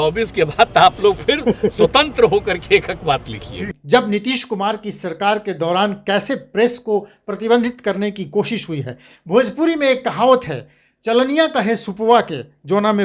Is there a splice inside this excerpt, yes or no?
yes